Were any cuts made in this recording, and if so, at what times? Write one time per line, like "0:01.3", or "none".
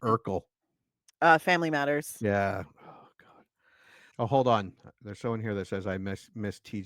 0:04.0